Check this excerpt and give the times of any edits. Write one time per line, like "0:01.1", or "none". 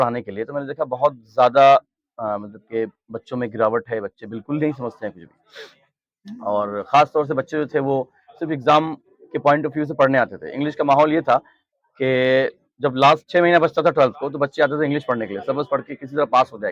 none